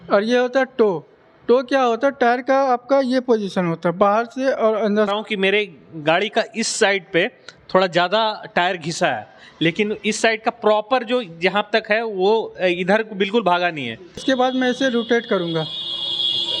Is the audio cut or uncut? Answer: cut